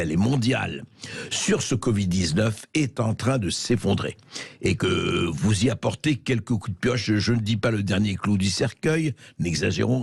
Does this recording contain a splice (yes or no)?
no